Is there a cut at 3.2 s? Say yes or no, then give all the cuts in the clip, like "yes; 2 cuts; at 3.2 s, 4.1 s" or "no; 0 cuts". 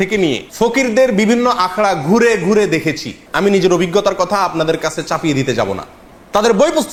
no; 0 cuts